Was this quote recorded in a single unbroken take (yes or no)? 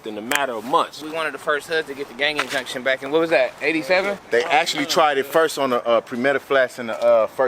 no